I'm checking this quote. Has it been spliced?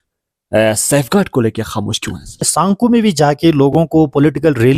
yes; 1 cut; at 2.5 s

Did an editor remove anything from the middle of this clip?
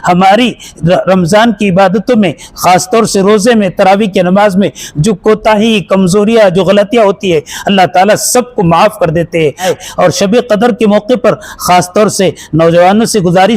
yes; 1 cut; at 9.7 s

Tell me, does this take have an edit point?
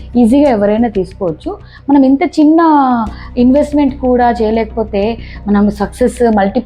no; 0 cuts

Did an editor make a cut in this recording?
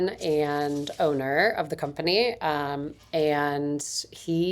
no; 0 cuts

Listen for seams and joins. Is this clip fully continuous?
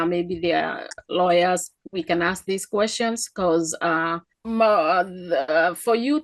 no; 1 cut; at 4.3 s

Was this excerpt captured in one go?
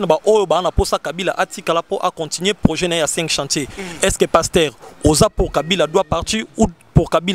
yes; 0 cuts

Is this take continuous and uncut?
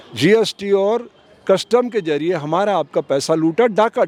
yes; 0 cuts

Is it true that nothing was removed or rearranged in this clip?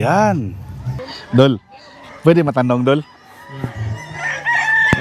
no; 1 cut; at 1.2 s

